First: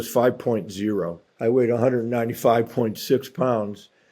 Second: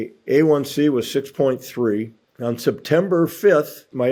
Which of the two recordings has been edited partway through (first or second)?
first